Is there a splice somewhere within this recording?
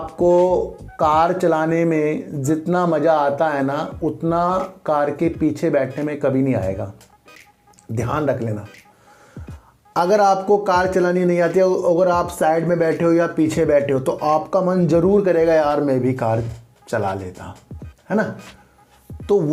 no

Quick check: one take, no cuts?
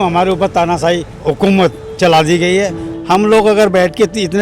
no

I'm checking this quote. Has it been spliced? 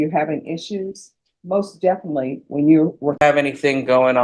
yes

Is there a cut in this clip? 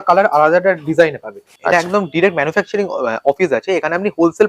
yes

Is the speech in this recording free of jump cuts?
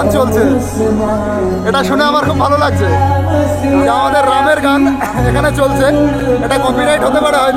yes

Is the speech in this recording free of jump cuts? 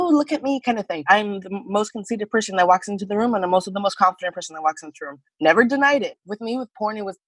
no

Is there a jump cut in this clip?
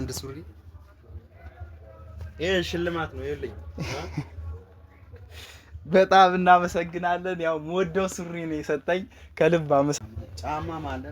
yes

